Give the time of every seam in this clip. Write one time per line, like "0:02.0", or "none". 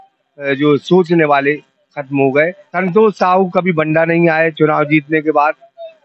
0:02.6